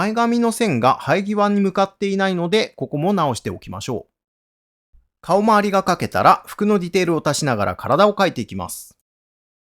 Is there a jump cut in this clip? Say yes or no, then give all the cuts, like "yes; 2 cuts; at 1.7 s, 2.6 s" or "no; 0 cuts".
no; 0 cuts